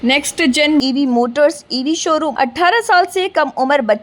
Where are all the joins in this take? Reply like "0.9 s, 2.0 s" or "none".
2.3 s